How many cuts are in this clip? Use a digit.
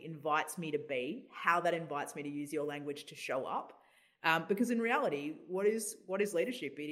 0